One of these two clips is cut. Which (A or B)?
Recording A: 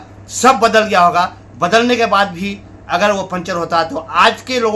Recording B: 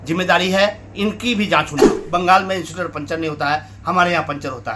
B